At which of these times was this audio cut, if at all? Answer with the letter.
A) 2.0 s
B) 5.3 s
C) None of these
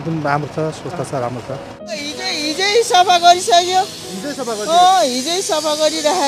A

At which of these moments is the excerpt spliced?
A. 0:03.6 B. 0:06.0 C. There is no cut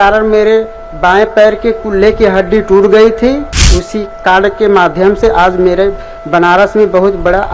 A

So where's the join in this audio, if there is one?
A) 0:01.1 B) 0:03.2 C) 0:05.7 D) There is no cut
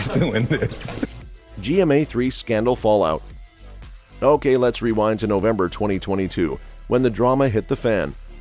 D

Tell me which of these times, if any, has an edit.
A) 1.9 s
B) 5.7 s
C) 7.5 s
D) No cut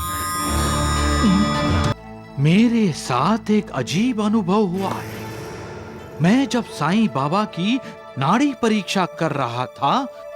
A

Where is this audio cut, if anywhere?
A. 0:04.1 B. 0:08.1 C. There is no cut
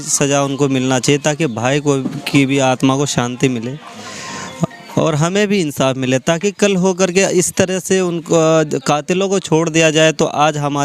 C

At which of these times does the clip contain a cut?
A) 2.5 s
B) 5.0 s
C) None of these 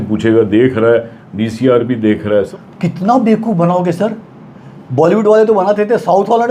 A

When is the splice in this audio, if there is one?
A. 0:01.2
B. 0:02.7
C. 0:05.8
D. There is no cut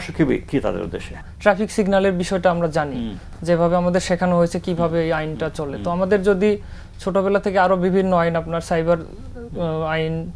A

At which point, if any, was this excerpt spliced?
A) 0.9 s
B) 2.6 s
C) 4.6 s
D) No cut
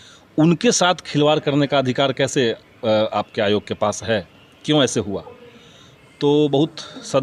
D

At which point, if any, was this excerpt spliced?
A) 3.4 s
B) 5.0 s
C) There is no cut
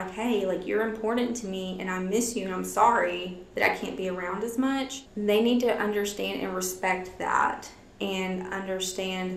B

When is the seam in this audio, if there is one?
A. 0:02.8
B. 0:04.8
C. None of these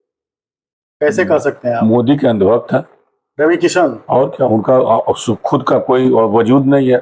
C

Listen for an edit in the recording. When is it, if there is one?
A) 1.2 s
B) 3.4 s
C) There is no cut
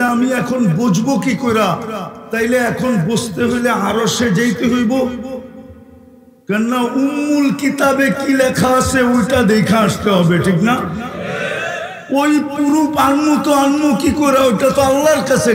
C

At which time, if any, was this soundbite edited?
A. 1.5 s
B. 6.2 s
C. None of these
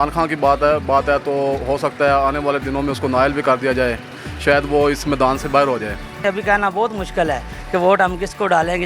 B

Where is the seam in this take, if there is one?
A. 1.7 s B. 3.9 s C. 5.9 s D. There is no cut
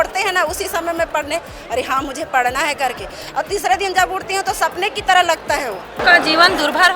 C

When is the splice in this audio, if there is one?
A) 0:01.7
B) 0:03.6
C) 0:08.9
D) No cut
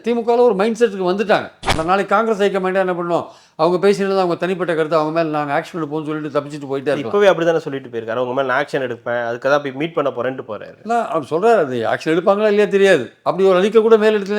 A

